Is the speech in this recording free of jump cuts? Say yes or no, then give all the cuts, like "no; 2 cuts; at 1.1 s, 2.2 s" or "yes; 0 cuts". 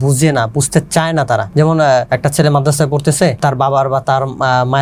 no; 3 cuts; at 1.5 s, 2.1 s, 3.4 s